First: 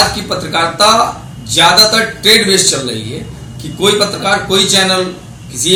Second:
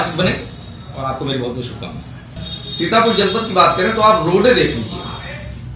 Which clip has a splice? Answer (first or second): second